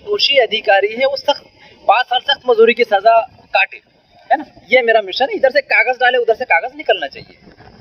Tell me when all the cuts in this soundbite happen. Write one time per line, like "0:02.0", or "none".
none